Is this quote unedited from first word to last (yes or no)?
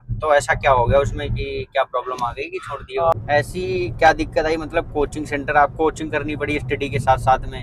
no